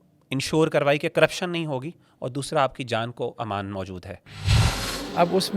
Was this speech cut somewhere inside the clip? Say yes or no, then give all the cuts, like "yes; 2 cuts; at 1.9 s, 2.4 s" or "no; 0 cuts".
yes; 1 cut; at 4.6 s